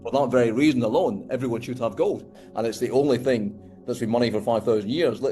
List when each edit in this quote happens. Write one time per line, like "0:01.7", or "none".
0:02.4